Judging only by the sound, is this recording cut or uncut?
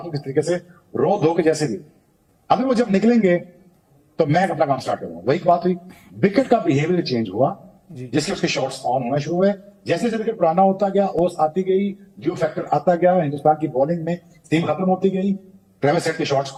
uncut